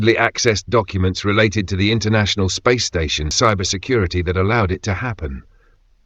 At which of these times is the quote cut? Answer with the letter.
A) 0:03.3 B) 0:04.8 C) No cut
A